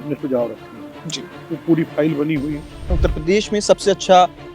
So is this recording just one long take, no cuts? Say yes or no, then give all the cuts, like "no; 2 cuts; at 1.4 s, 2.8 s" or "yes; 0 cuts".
no; 1 cut; at 2.9 s